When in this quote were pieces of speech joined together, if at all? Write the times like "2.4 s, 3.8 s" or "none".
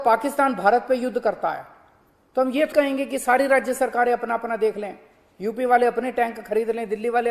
2.7 s